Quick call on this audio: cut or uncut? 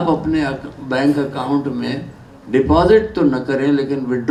uncut